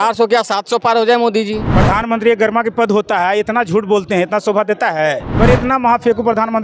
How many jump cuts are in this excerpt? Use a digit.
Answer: 2